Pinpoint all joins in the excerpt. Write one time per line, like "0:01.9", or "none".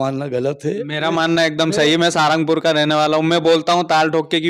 none